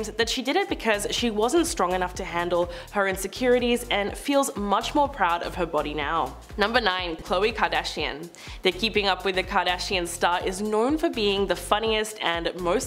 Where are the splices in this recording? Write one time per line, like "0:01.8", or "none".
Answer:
0:07.2